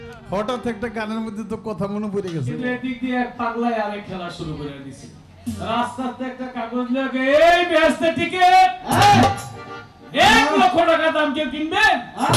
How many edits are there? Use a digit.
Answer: 1